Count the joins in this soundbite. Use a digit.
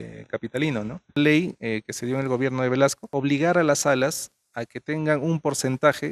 2